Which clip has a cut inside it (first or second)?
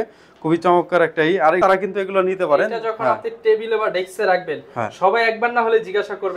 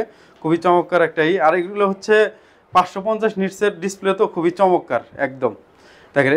first